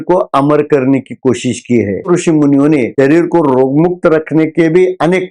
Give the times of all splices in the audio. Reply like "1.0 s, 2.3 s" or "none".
2.1 s